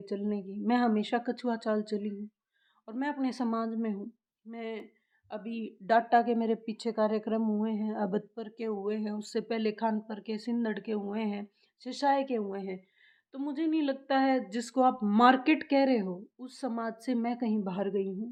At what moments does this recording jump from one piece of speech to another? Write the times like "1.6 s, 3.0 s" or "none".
none